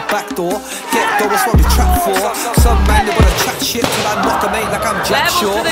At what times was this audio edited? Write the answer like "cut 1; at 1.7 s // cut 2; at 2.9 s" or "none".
none